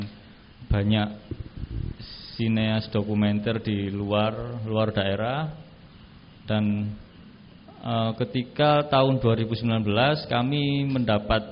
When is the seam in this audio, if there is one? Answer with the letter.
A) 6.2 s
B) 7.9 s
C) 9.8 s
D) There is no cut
D